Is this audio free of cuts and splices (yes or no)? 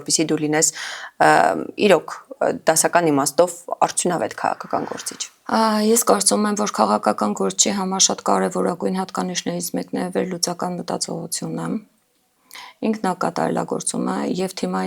yes